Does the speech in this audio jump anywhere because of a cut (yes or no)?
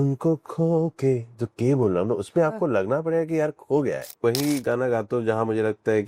yes